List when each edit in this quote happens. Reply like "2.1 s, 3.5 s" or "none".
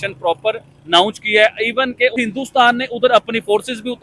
2.2 s